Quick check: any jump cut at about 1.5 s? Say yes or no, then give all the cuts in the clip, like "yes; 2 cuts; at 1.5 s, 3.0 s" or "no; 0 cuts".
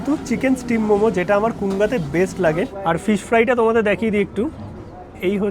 no; 1 cut; at 2.8 s